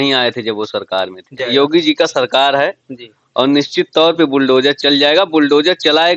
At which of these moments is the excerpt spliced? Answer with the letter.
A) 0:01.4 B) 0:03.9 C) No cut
A